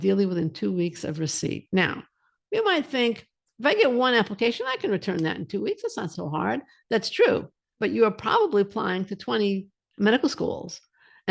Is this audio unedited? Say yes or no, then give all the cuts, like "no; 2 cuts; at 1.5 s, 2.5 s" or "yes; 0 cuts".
no; 1 cut; at 6.1 s